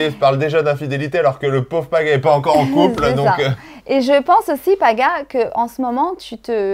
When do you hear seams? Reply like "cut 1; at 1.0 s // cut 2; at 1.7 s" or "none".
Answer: none